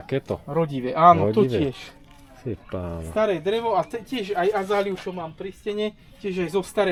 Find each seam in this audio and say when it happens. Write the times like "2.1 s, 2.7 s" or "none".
none